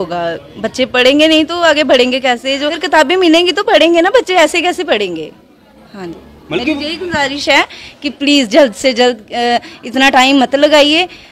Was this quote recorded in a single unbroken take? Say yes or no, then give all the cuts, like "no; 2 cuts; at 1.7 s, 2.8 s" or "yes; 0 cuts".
yes; 0 cuts